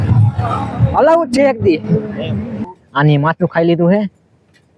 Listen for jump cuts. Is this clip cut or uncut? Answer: cut